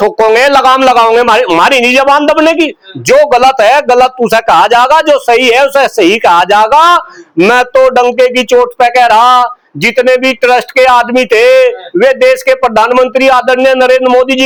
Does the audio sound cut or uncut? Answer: uncut